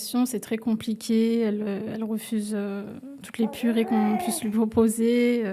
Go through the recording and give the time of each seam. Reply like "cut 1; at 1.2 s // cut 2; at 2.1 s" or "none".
none